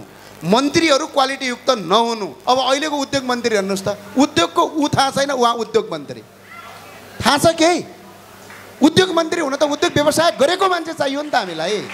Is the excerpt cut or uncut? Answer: cut